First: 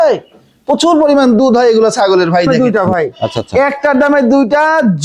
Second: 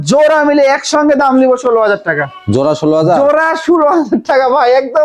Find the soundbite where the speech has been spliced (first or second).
first